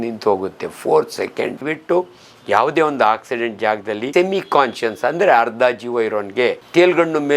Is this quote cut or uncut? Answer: cut